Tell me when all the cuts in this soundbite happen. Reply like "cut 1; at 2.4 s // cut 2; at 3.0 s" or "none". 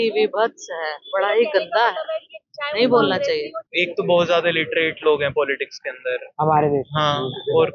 cut 1; at 3.6 s